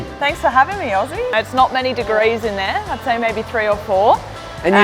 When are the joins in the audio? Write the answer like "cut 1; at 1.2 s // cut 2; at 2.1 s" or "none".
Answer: cut 1; at 1.3 s